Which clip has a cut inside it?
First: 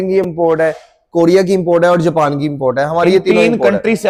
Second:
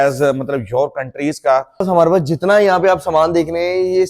second; 1 cut; at 1.9 s

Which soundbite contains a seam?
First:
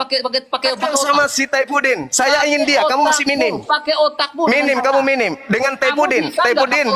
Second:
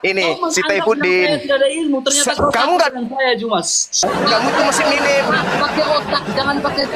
second; 1 cut; at 4.0 s

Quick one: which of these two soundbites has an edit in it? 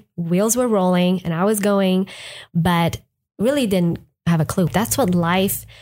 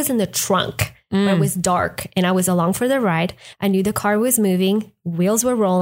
first; 1 cut; at 4.7 s

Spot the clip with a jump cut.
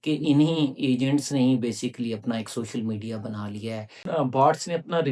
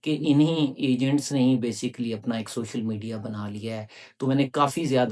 first; 1 cut; at 4.0 s

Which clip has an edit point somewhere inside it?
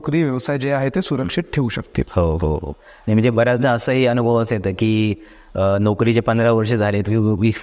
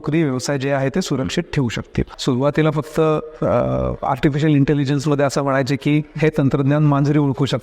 second; 1 cut; at 2.1 s

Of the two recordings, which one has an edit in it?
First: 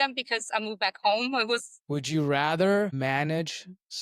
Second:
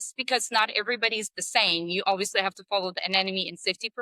first; 1 cut; at 1.7 s

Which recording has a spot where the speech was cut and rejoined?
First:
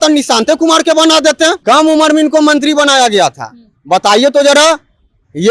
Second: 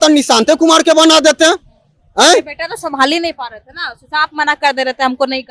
first; 1 cut; at 1.6 s

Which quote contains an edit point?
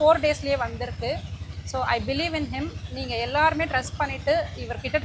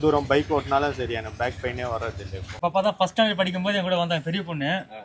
second; 1 cut; at 2.5 s

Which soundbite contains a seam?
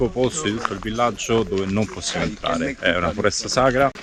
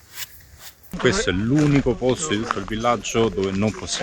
second; 1 cut; at 0.9 s

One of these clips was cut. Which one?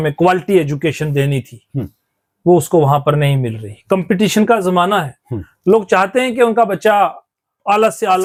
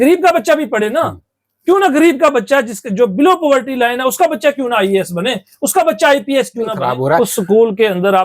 second; 1 cut; at 6.8 s

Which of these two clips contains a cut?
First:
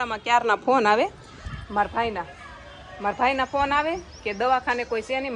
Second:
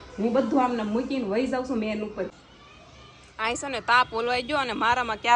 second; 1 cut; at 2.3 s

